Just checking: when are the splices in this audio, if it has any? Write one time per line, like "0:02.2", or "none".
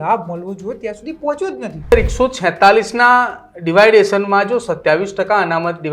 0:01.9